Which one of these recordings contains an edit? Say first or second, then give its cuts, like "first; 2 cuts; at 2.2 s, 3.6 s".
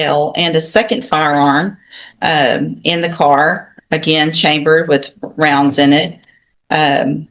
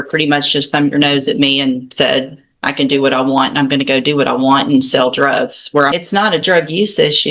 second; 1 cut; at 5.9 s